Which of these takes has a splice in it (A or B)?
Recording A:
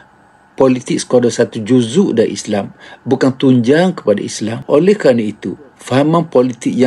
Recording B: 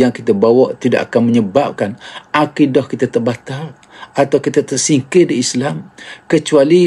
A